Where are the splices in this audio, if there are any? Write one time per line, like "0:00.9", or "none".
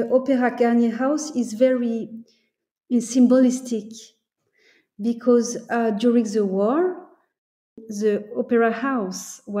0:07.8